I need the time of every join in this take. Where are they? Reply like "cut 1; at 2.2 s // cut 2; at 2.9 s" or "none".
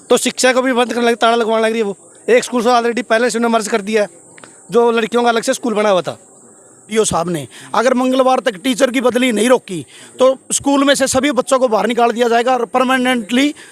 cut 1; at 6.9 s